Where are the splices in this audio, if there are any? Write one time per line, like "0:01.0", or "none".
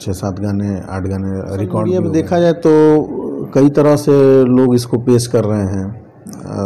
0:01.9